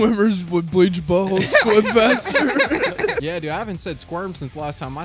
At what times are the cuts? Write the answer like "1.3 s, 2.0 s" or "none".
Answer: 3.2 s